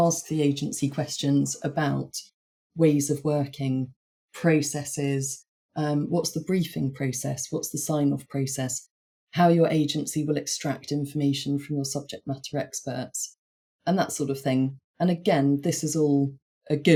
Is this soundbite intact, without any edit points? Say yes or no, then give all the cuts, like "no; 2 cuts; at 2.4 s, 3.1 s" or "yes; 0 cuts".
yes; 0 cuts